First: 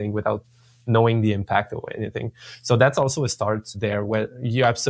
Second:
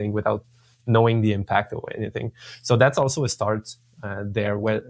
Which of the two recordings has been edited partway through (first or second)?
first